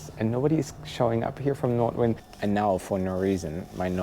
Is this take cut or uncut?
cut